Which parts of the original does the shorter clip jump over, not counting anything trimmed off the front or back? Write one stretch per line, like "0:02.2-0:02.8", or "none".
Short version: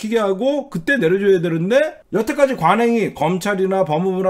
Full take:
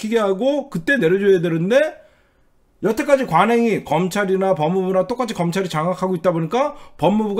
0:02.0-0:02.7